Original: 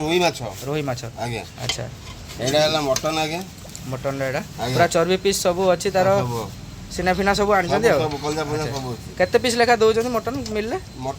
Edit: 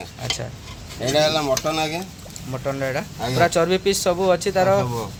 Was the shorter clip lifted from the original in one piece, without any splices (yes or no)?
yes